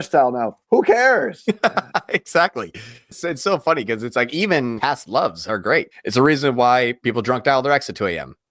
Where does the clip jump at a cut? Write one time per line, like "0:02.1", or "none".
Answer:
0:03.1
0:04.8
0:06.0
0:07.0